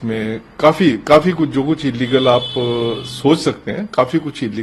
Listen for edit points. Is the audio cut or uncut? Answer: uncut